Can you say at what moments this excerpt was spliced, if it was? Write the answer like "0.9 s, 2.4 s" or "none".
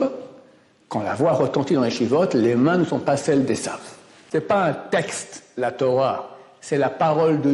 4.3 s